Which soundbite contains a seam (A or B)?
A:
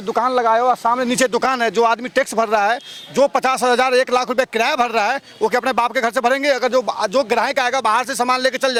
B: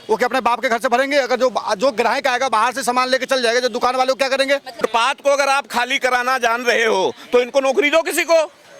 B